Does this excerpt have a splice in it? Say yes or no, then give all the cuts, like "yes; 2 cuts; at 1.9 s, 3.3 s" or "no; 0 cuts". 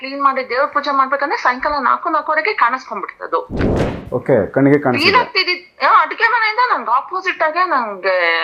no; 0 cuts